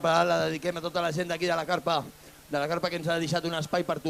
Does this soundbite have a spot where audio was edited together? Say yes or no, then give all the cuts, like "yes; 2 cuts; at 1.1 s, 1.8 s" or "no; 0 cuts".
no; 0 cuts